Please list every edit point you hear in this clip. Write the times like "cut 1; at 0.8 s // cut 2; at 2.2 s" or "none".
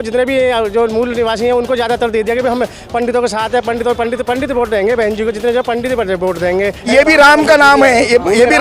cut 1; at 6.8 s